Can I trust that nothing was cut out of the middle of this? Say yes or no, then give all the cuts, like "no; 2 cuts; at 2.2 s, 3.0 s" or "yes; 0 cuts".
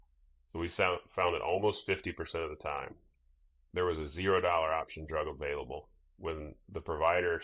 yes; 0 cuts